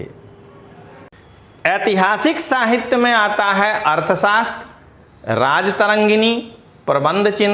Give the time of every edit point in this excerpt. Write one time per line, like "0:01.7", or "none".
0:01.1